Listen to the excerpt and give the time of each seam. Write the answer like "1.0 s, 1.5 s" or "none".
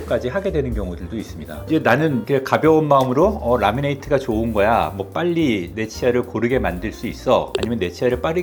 none